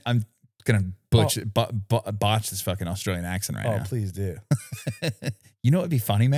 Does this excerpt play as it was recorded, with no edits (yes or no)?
yes